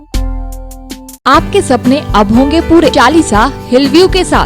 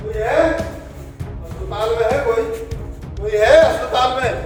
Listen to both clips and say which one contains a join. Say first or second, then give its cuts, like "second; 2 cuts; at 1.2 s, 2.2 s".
first; 2 cuts; at 1.2 s, 2.9 s